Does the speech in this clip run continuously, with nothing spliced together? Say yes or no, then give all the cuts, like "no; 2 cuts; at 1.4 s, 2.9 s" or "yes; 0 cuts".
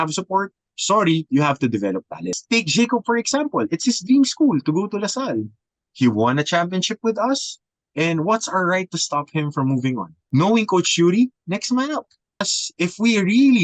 no; 3 cuts; at 2.3 s, 10.1 s, 12.6 s